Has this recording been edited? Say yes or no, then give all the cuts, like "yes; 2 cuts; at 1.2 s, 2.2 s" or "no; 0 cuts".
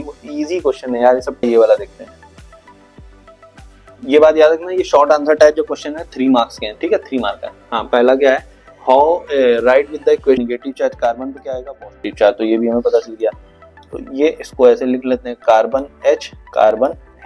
yes; 2 cuts; at 1.4 s, 10.4 s